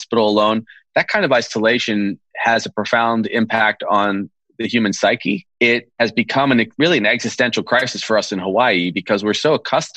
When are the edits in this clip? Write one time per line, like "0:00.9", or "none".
0:05.8
0:06.7